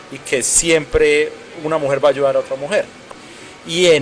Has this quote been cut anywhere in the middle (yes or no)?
yes